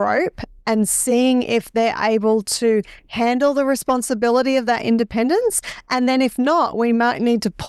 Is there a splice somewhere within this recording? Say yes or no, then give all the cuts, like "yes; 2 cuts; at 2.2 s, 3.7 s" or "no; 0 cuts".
no; 0 cuts